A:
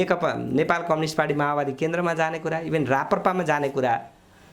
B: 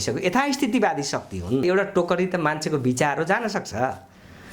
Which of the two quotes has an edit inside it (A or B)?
B